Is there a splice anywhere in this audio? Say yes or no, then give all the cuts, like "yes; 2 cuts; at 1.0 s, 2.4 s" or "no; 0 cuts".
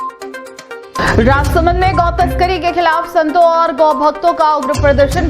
yes; 1 cut; at 1.0 s